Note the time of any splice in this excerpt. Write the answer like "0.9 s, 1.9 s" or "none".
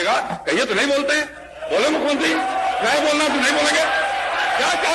none